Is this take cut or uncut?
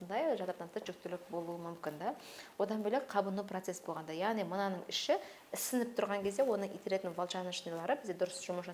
uncut